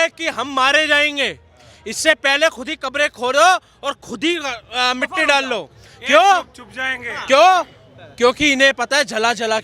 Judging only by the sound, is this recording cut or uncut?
uncut